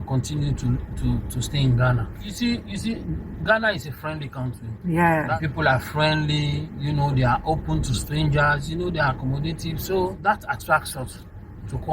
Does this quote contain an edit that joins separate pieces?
yes; 3 cuts; at 2.3 s, 5.3 s, 10.2 s

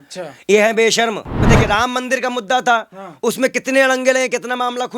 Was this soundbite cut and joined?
yes; 1 cut; at 1.3 s

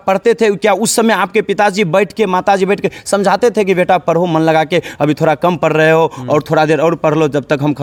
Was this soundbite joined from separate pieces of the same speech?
no; 0 cuts

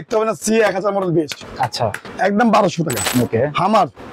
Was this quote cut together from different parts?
yes; 2 cuts; at 2.1 s, 3.0 s

